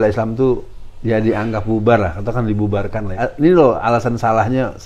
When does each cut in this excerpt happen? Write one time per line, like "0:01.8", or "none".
0:03.2